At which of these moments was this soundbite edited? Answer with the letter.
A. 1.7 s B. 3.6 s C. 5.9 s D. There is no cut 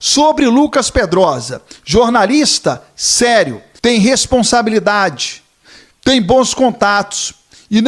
B